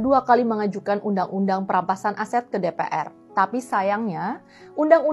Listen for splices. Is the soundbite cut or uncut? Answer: uncut